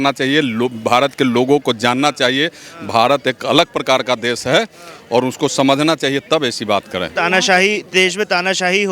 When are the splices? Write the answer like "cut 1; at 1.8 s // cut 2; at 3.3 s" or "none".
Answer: cut 1; at 7.1 s